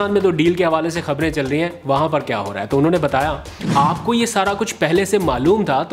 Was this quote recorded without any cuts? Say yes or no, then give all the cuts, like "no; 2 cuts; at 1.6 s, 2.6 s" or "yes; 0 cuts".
no; 1 cut; at 3.6 s